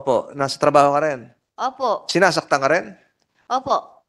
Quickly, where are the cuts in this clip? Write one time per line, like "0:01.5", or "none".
none